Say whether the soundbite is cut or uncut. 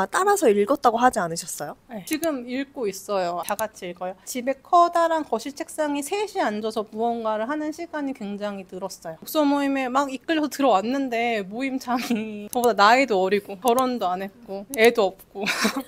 cut